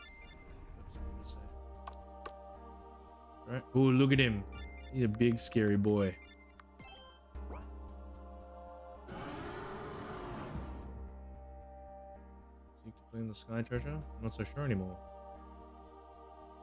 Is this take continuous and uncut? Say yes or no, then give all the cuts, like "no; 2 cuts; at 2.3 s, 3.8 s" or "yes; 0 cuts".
yes; 0 cuts